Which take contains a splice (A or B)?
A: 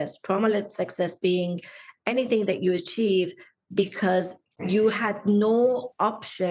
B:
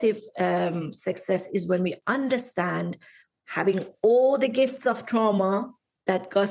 A